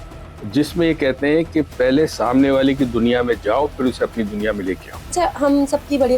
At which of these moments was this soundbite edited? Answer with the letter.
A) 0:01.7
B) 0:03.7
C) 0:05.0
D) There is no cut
C